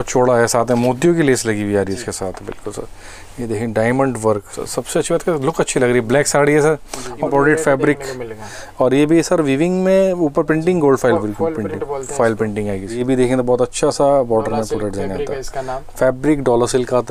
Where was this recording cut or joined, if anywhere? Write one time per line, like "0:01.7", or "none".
0:04.6
0:07.3
0:13.0

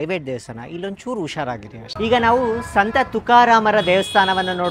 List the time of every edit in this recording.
0:01.8

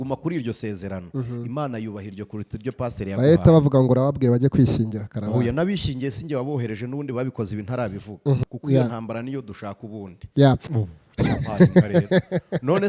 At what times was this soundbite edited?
0:08.4
0:10.7

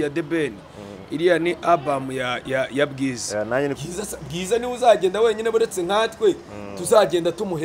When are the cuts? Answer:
0:03.7

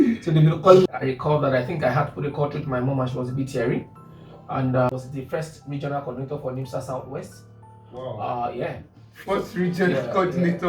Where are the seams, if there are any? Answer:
0:00.9
0:04.9

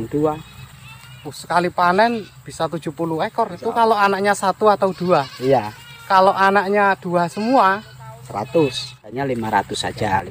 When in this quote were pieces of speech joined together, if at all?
0:03.6
0:09.1

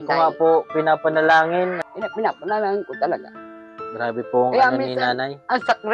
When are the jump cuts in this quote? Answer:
0:01.8

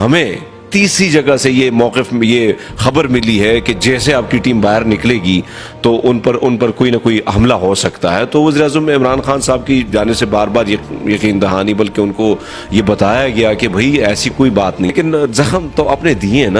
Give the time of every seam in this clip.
0:14.9

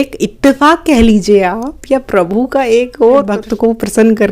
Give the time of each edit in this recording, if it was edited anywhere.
0:03.4

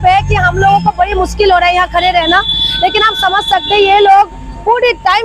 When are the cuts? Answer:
none

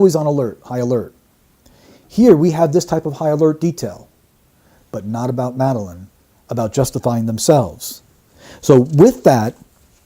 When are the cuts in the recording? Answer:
0:01.2

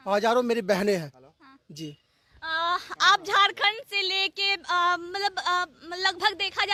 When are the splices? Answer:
none

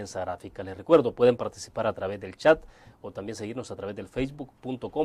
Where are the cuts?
0:01.6

